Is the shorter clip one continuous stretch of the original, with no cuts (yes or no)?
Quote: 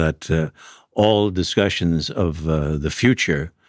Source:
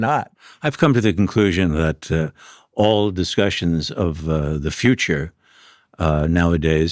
yes